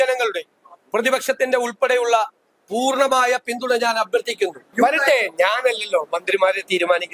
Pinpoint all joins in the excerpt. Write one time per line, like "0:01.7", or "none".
0:04.6